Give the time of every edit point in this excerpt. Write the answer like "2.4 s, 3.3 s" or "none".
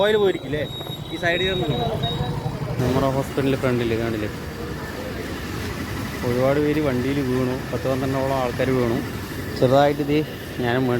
2.8 s